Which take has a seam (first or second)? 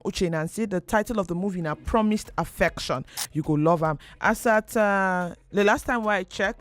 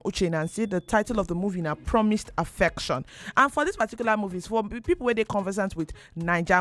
first